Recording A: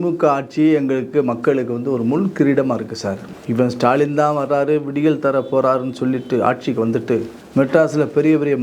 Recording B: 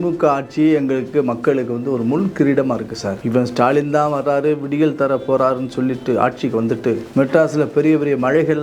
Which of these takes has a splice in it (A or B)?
B